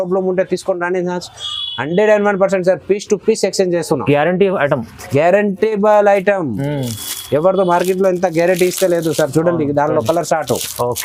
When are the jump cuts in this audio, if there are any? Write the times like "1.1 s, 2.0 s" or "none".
none

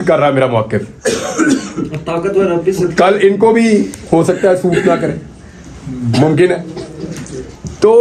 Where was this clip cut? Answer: none

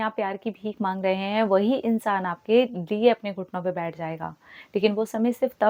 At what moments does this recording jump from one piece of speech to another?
none

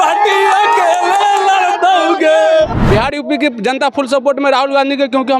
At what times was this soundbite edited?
2.8 s

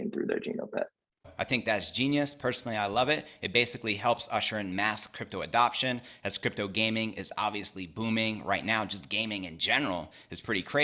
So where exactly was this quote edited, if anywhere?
none

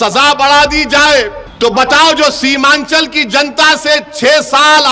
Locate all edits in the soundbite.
1.4 s

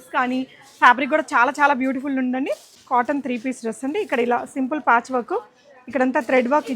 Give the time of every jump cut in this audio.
2.7 s

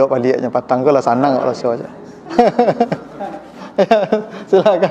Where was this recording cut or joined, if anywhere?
none

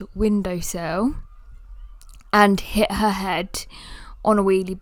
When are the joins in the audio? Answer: none

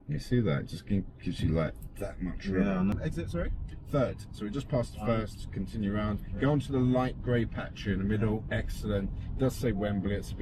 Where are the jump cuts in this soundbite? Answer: 2.9 s

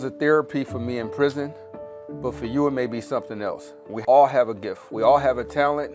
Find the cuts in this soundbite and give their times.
4.0 s

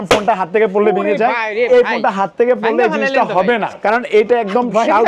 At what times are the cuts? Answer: 3.7 s

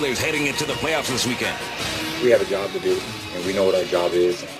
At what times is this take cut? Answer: none

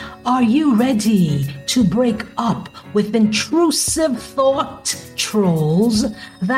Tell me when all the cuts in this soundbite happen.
none

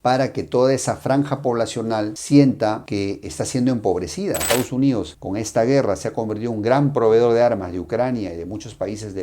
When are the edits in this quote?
4.4 s

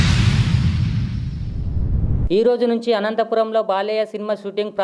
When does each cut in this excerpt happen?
2.1 s

